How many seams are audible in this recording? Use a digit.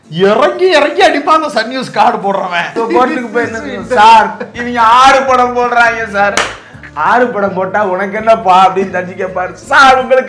1